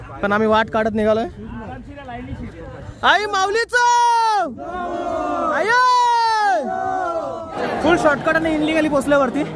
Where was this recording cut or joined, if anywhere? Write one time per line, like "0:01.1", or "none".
0:07.5